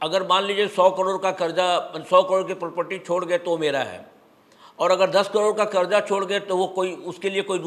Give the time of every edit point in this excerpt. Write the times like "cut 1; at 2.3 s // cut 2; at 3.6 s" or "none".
none